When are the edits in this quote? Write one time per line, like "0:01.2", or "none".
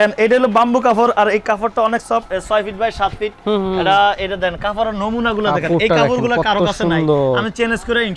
none